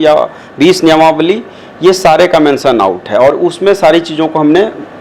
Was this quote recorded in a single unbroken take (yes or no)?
yes